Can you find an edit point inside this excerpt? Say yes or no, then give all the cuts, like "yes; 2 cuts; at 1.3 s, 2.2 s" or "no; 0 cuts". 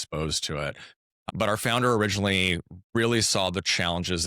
yes; 1 cut; at 1.1 s